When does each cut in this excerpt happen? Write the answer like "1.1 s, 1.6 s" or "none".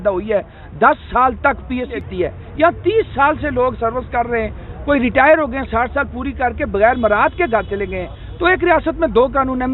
2.0 s

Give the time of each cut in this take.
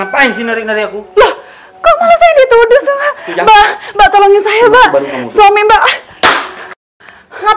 none

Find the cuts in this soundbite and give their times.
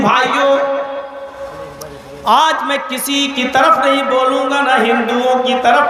none

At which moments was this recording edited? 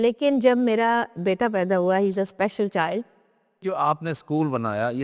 3.6 s

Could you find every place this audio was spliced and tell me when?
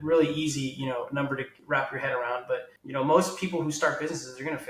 1.5 s, 2.8 s

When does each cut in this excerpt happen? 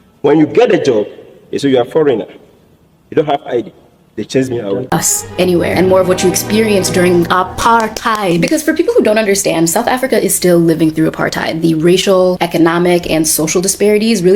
4.9 s

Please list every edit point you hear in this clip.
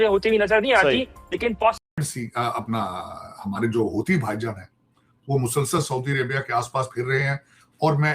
1.8 s

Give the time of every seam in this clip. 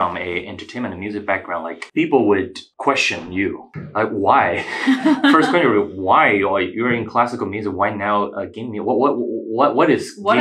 1.8 s, 2.6 s, 3.7 s

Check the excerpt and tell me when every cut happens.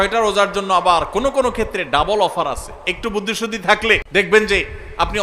4.0 s

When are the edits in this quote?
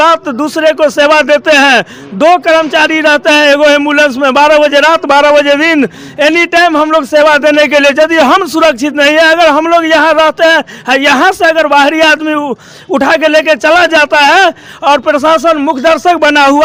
none

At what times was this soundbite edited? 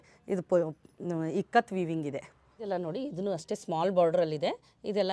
2.7 s

